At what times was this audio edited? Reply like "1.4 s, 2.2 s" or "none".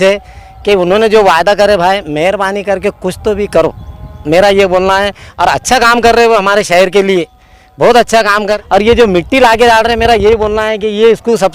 8.5 s